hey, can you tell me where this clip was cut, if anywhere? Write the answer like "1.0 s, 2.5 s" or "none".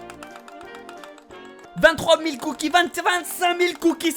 none